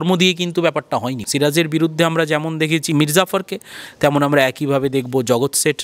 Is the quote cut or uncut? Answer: cut